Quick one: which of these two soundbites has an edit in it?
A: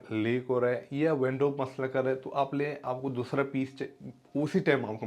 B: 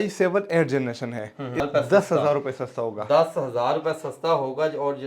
B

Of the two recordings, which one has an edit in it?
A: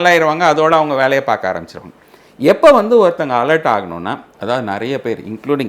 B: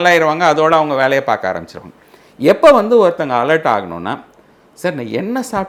A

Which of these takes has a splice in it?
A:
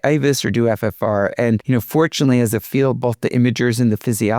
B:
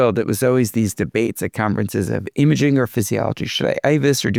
A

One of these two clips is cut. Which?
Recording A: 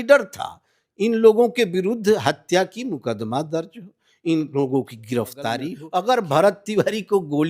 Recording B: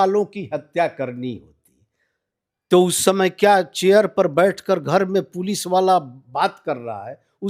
A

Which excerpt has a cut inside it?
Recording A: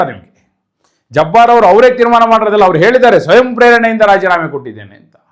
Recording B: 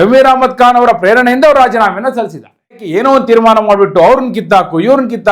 B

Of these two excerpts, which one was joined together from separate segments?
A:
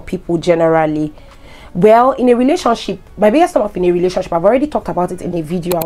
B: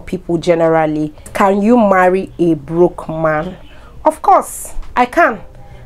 B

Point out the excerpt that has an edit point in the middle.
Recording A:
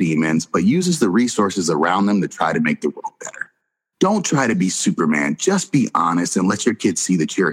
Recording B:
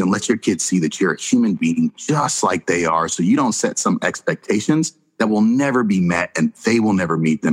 A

